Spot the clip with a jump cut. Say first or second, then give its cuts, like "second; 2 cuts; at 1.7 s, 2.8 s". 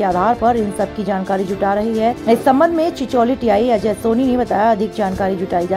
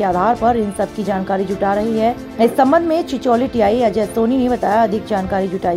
first; 1 cut; at 2.2 s